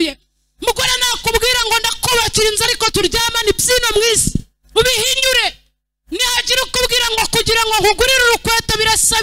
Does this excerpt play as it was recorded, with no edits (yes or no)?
yes